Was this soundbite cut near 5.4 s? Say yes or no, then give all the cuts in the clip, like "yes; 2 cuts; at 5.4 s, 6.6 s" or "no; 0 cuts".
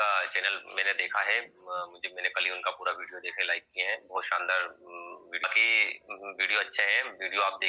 yes; 1 cut; at 5.4 s